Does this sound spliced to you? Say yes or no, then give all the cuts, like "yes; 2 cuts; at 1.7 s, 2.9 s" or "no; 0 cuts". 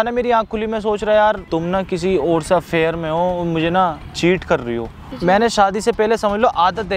yes; 2 cuts; at 1.4 s, 5.1 s